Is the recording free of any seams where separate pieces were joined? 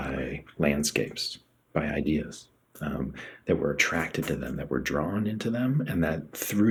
yes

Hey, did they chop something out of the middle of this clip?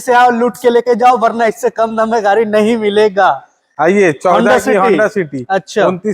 no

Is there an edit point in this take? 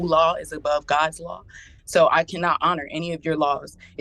no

